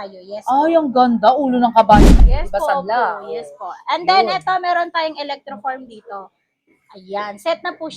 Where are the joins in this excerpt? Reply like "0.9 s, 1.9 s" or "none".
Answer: 2.0 s